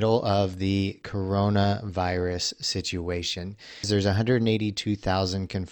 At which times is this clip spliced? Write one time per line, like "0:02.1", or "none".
0:03.9